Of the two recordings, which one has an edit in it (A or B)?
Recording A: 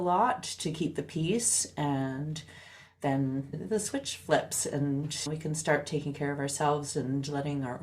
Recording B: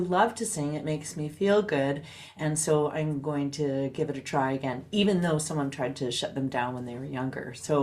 A